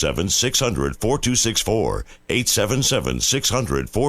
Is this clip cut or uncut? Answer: cut